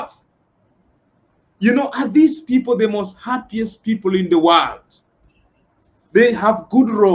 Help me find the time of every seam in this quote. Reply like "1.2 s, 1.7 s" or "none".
none